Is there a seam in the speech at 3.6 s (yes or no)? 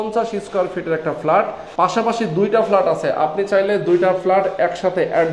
no